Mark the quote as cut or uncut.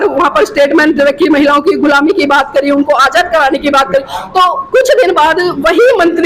uncut